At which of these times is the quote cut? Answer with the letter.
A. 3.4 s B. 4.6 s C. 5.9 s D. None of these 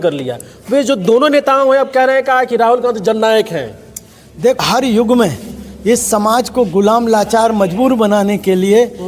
B